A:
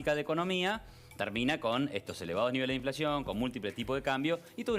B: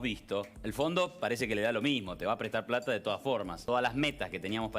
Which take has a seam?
B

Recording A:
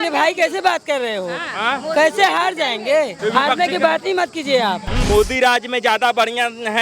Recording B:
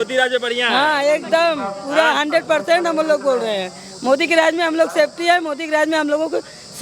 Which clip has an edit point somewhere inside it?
A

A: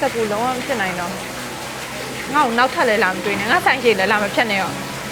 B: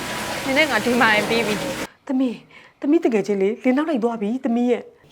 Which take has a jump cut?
B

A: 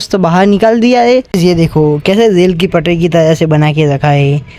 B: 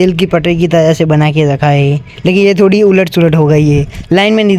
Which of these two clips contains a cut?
A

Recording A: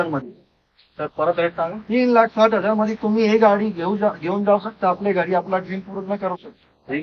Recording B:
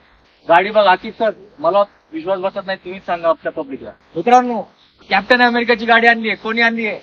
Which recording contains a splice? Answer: B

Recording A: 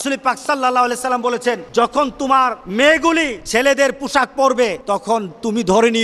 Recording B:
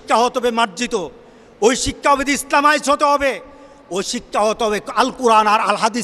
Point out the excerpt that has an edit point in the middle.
A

